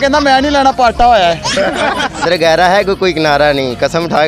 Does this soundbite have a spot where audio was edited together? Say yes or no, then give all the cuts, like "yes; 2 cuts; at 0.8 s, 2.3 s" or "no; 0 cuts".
yes; 1 cut; at 2.2 s